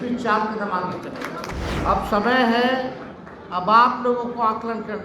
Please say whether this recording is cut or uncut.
cut